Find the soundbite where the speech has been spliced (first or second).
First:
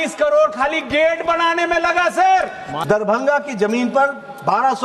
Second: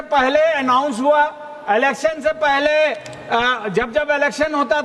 first